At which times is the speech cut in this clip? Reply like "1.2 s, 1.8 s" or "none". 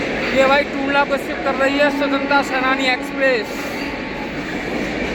none

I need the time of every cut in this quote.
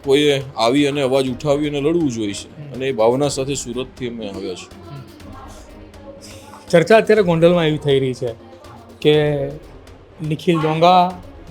none

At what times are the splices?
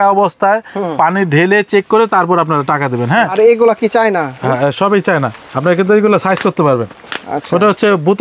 3.3 s

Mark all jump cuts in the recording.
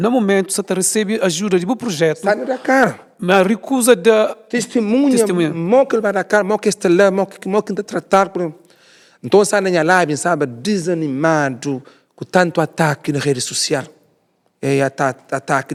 none

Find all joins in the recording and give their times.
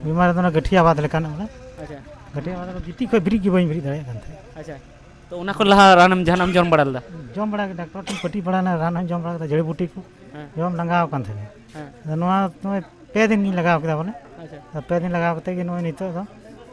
none

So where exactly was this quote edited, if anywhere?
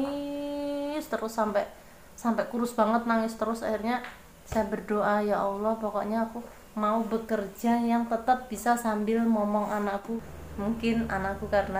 10.2 s

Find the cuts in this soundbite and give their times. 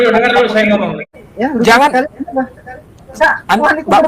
1.1 s

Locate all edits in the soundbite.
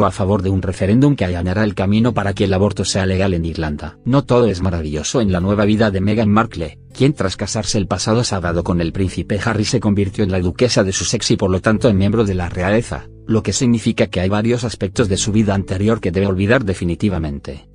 none

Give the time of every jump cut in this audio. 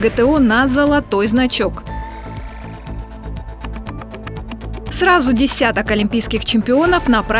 1.9 s, 5.0 s

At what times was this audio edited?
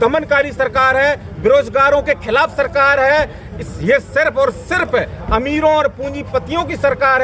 none

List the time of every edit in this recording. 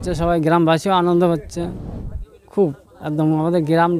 none

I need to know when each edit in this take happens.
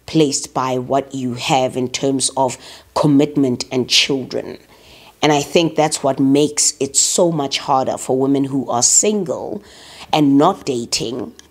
none

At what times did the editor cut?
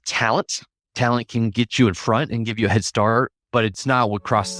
1.7 s, 3.7 s

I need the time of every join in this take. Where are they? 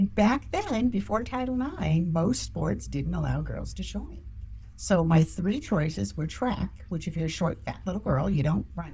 none

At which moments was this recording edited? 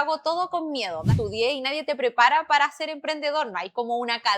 1.1 s

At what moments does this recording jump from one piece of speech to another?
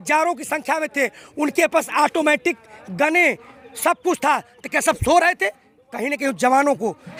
none

